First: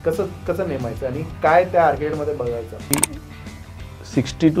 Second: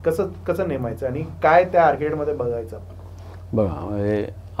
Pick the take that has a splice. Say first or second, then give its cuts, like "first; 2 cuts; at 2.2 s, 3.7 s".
first; 1 cut; at 2.9 s